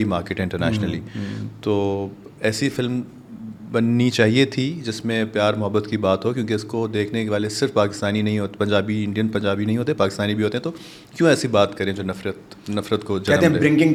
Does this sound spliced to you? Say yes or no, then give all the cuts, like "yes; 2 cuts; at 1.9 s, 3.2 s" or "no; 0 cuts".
no; 0 cuts